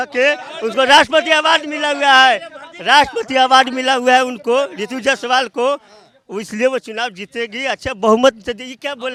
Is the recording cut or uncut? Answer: uncut